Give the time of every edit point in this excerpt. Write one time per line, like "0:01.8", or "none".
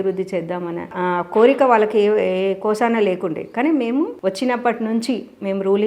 none